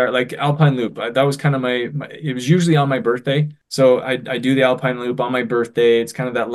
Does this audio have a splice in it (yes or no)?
yes